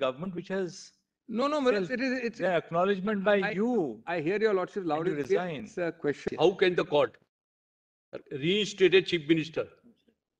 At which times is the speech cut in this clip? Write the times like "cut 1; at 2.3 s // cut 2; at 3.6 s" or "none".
cut 1; at 6.2 s